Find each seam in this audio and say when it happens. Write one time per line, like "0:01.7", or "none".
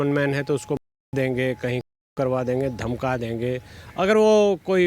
none